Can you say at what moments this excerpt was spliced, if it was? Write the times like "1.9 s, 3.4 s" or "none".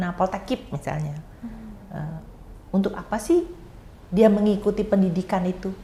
none